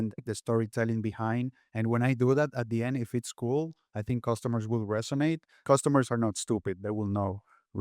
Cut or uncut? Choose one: cut